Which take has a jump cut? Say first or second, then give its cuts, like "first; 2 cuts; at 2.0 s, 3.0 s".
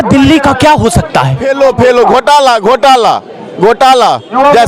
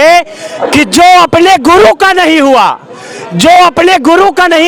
first; 1 cut; at 1.4 s